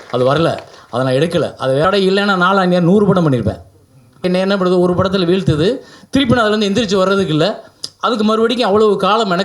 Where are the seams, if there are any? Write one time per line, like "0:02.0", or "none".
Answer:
0:01.8
0:04.2